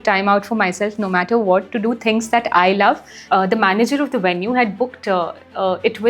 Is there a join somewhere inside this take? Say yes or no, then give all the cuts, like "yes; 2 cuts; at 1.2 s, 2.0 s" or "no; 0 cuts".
yes; 1 cut; at 3.2 s